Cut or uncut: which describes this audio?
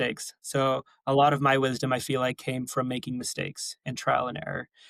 uncut